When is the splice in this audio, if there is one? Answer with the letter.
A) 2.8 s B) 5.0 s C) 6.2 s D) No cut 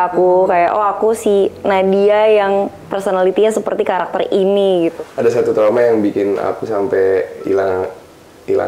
B